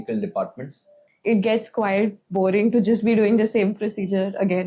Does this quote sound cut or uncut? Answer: cut